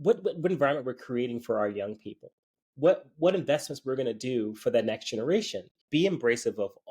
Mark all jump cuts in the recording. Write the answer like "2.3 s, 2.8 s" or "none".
5.8 s